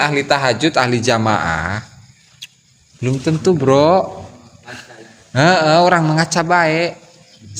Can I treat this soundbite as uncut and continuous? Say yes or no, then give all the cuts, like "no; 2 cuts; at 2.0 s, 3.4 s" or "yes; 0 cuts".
yes; 0 cuts